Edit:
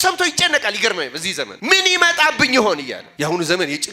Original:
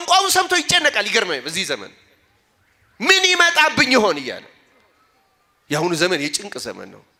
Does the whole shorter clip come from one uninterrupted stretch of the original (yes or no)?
no